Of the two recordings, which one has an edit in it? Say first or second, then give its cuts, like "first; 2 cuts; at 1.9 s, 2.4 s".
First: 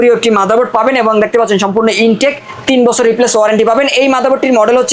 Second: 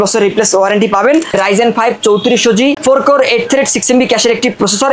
second; 2 cuts; at 1.3 s, 2.8 s